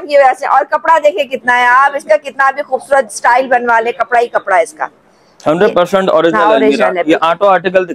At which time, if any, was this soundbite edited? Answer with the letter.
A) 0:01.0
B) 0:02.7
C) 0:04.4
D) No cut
D